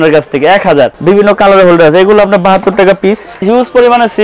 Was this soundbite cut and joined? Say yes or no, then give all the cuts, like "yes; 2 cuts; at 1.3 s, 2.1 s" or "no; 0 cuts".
yes; 2 cuts; at 1.0 s, 3.5 s